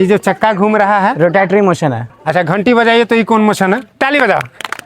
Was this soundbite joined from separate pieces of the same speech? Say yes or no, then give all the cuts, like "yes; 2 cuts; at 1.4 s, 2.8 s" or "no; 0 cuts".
yes; 2 cuts; at 2.1 s, 4.0 s